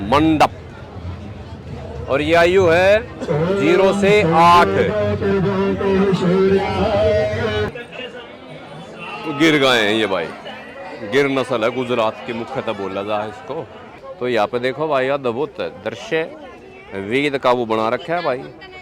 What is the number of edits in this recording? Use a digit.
2